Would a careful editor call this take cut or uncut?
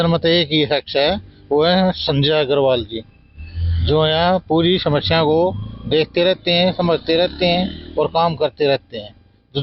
uncut